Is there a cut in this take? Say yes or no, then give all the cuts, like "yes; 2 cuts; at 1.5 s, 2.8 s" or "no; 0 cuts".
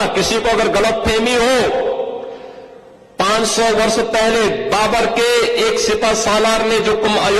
no; 0 cuts